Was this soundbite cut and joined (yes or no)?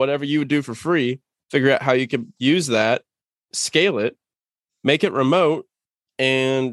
no